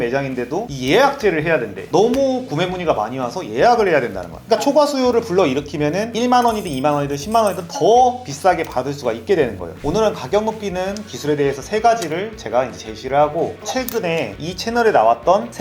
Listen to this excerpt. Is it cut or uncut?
cut